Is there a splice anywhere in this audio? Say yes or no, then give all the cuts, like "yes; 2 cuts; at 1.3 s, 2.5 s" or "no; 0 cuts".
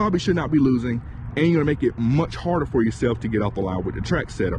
no; 0 cuts